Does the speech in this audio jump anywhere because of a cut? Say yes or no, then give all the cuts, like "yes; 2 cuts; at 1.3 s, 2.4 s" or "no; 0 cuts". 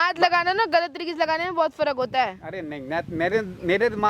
no; 0 cuts